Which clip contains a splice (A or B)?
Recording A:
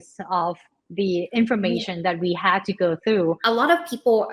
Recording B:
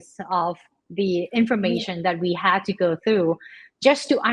A